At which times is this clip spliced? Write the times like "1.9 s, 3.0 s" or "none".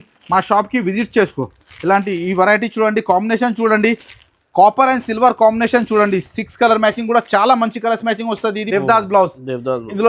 8.6 s